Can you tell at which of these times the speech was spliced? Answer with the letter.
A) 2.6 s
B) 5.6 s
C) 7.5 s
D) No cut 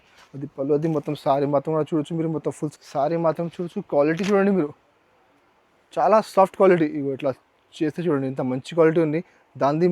A